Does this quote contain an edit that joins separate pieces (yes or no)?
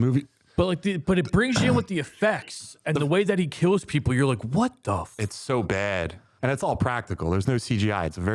yes